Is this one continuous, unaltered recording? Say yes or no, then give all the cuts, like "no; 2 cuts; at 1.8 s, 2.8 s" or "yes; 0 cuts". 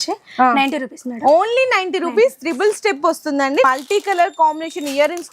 no; 1 cut; at 3.6 s